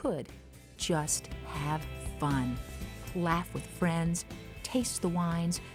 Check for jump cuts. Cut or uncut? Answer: uncut